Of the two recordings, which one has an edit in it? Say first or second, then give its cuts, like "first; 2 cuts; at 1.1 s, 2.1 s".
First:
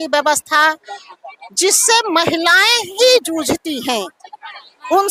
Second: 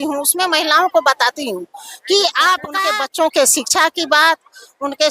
second; 1 cut; at 2.7 s